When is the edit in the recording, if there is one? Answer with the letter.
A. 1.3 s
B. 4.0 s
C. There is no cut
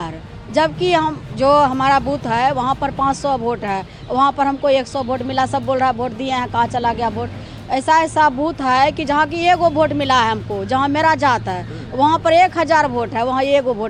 C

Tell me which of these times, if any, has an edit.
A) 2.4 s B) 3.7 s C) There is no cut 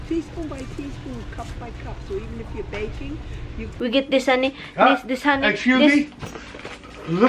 B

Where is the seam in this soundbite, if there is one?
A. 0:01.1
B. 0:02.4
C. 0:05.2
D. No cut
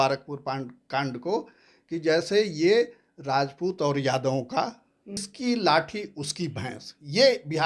C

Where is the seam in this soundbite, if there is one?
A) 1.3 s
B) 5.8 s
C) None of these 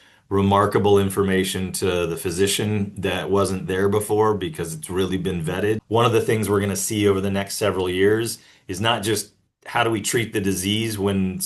B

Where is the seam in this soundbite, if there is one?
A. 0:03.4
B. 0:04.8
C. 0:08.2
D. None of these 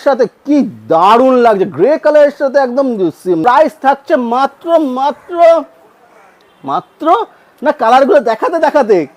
A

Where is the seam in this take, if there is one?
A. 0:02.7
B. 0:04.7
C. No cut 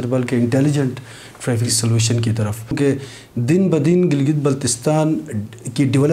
A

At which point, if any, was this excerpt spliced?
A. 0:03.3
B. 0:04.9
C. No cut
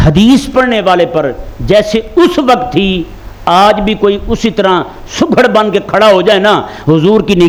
C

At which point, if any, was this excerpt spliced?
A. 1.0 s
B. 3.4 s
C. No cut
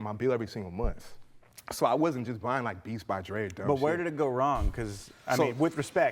B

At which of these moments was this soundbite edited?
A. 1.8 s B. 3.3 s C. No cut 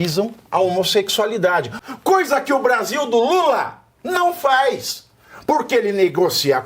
A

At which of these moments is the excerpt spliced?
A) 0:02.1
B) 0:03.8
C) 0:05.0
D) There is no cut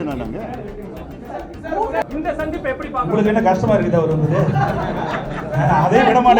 A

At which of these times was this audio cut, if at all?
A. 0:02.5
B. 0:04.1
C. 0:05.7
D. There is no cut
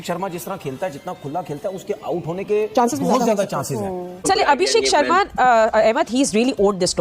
B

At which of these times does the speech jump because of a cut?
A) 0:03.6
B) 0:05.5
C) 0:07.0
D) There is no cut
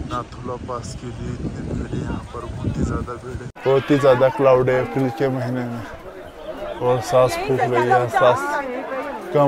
A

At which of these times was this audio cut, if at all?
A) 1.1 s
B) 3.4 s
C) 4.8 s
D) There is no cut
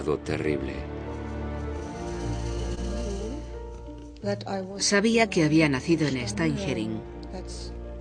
D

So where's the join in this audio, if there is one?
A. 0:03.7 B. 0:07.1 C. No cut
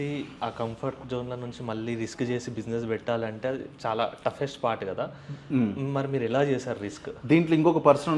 C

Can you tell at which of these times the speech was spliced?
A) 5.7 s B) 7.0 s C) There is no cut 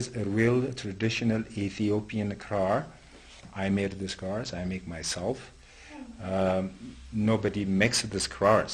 B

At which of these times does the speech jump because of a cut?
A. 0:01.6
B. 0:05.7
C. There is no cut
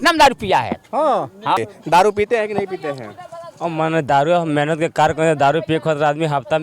A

